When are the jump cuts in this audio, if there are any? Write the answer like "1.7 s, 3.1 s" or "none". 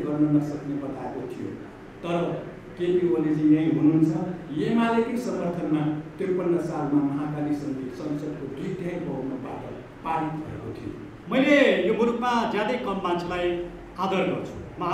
11.1 s

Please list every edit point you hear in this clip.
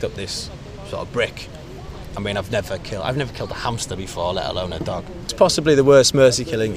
5.2 s

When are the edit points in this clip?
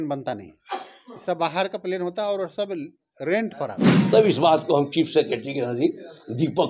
3.9 s

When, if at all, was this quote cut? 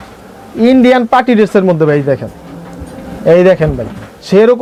none

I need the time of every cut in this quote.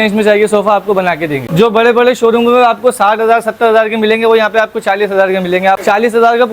1.4 s, 5.8 s

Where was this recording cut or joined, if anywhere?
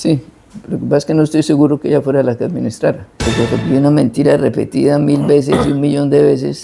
3.6 s

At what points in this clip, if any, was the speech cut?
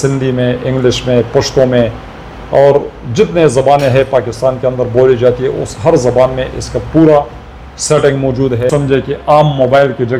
8.7 s

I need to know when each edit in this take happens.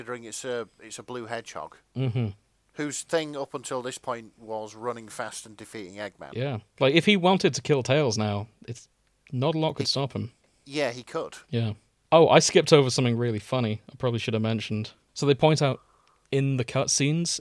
11.4 s, 15.0 s

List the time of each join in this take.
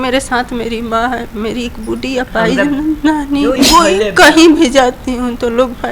3.6 s

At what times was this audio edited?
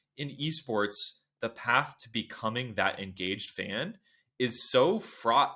none

